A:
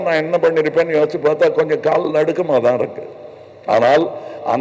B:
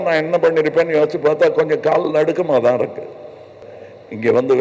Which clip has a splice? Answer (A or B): B